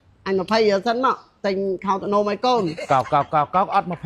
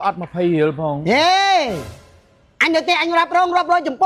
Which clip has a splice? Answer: first; 1 cut; at 2.8 s

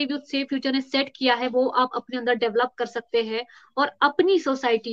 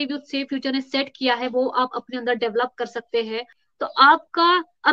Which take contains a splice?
second; 1 cut; at 3.6 s

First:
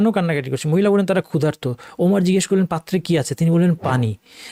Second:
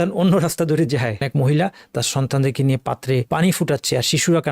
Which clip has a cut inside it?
second; 2 cuts; at 1.2 s, 3.3 s

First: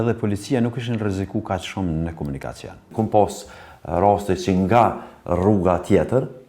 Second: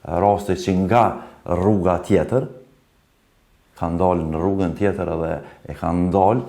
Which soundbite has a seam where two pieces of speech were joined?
first; 1 cut; at 2.9 s

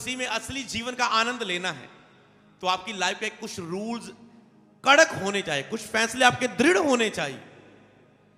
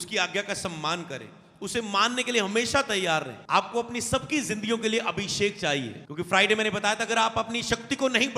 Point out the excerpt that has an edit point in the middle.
second; 2 cuts; at 3.4 s, 6.0 s

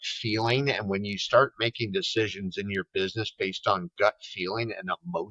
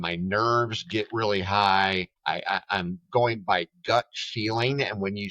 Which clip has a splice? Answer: second; 1 cut; at 2.1 s

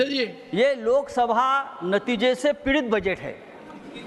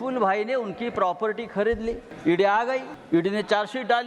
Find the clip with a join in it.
second; 2 cuts; at 2.1 s, 2.9 s

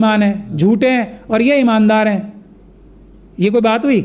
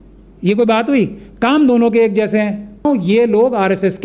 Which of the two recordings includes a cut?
second; 1 cut; at 2.8 s

